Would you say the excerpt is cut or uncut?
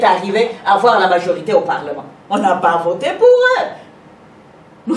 uncut